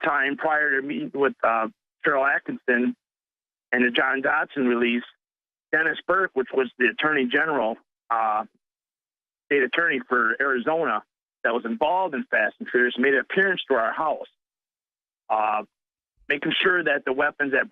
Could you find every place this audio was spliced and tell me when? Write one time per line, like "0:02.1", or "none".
0:13.6